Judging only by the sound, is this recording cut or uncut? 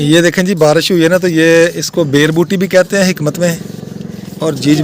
uncut